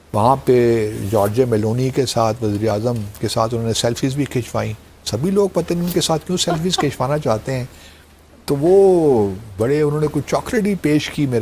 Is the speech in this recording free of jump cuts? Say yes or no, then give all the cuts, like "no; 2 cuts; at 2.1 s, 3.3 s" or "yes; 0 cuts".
yes; 0 cuts